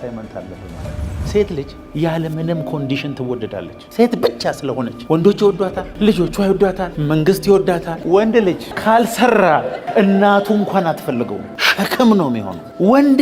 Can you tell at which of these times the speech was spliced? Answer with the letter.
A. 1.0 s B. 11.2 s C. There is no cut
A